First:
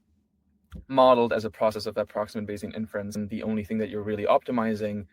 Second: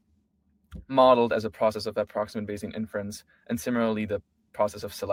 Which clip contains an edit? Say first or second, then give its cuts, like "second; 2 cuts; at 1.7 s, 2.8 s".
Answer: first; 1 cut; at 3.2 s